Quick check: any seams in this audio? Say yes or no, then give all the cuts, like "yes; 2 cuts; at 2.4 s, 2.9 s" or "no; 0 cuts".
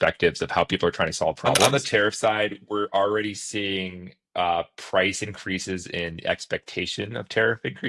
yes; 1 cut; at 1.6 s